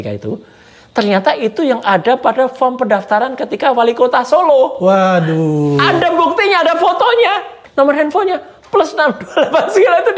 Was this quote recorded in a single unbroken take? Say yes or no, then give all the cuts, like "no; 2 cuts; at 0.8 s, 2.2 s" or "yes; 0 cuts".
no; 1 cut; at 7.6 s